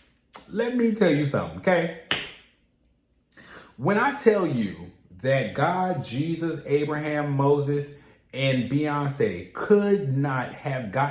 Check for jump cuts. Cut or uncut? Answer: uncut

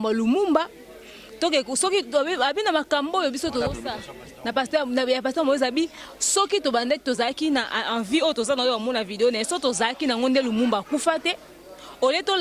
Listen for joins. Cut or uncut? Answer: uncut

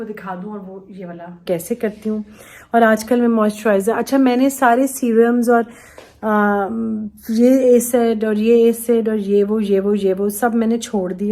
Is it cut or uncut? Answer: cut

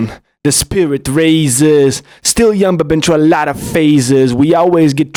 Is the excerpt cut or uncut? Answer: uncut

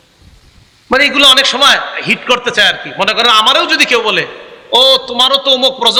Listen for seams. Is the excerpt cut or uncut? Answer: uncut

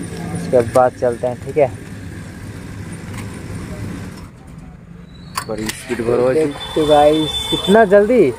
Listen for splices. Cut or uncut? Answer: uncut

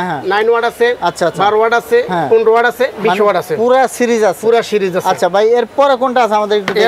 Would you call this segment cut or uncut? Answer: uncut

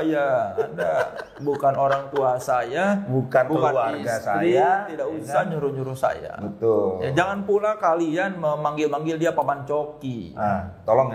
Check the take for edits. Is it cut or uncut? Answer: uncut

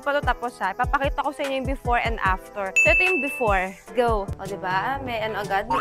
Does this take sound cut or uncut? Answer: cut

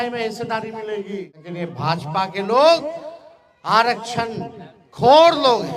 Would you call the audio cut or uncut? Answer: cut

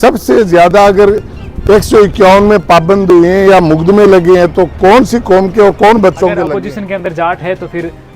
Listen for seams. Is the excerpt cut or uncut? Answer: cut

